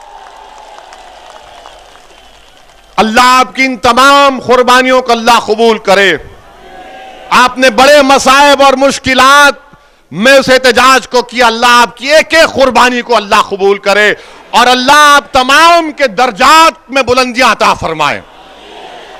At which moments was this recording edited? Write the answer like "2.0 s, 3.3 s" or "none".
none